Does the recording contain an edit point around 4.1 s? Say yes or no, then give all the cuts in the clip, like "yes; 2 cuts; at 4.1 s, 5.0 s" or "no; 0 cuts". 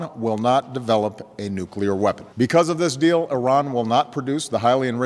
no; 1 cut; at 2.3 s